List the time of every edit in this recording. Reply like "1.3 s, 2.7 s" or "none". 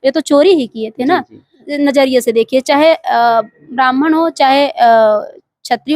1.7 s